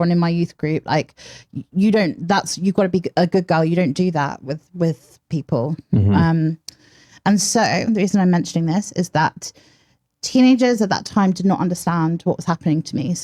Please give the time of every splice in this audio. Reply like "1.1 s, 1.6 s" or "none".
none